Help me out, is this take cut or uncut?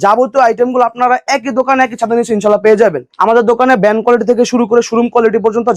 cut